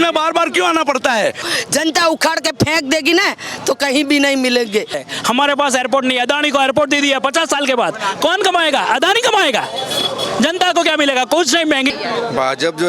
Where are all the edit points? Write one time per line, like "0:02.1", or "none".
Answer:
0:01.5
0:05.0
0:11.9